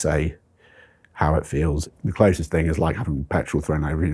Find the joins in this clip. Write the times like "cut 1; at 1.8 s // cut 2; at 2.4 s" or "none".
cut 1; at 1.8 s